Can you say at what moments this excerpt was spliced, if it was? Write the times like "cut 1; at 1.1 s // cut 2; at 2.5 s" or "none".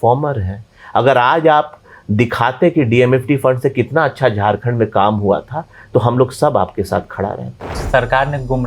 cut 1; at 7.7 s